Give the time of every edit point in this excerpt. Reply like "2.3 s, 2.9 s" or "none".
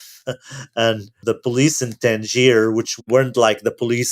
1.1 s, 3.0 s